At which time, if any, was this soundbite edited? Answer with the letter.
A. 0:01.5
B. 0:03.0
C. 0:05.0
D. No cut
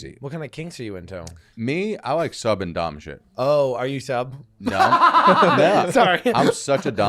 A